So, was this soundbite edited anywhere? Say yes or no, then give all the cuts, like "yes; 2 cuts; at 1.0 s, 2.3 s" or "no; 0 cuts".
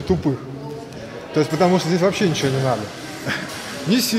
no; 0 cuts